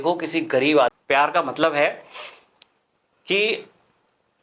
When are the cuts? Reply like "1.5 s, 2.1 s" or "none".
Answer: 1.0 s